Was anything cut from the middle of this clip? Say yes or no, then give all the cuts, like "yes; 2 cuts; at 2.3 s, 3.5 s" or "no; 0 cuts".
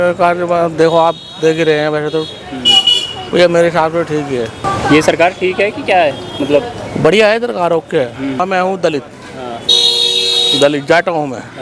yes; 2 cuts; at 4.6 s, 8.4 s